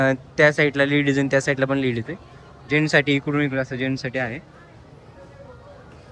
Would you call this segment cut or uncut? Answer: uncut